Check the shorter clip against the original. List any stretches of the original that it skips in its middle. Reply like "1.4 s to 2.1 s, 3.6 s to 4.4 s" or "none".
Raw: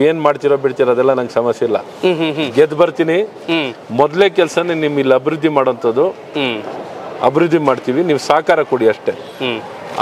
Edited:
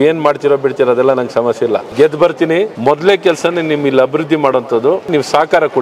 1.9 s to 2.5 s, 3.3 s to 3.9 s, 6.2 s to 8.1 s